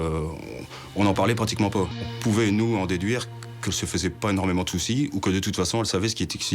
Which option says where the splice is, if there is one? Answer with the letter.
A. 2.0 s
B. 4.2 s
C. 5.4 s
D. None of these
A